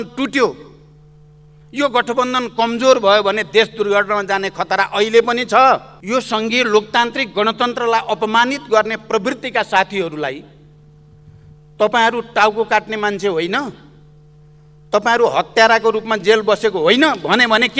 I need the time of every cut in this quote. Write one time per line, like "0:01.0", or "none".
0:05.9